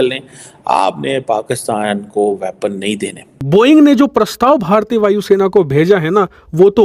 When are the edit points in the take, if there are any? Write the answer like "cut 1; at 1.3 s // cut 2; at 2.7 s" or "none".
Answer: cut 1; at 3.4 s

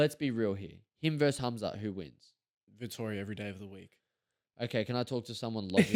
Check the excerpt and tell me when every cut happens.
none

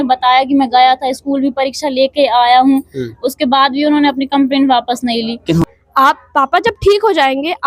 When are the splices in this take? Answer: cut 1; at 5.6 s

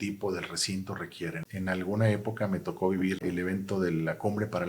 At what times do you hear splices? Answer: cut 1; at 1.4 s // cut 2; at 3.2 s

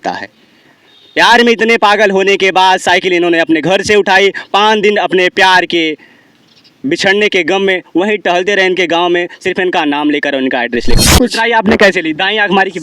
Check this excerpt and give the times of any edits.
cut 1; at 11.0 s

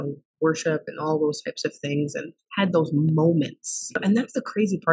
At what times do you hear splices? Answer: cut 1; at 4.0 s

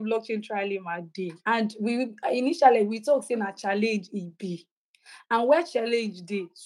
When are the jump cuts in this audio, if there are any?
cut 1; at 1.4 s

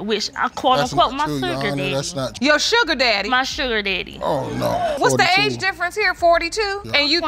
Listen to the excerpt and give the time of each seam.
none

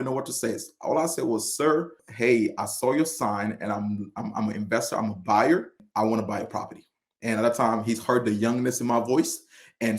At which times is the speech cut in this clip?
cut 1; at 2.0 s // cut 2; at 5.8 s

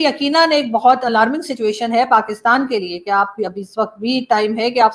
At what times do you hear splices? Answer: cut 1; at 3.3 s

